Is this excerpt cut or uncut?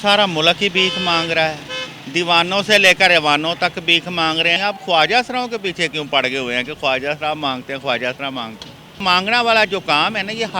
cut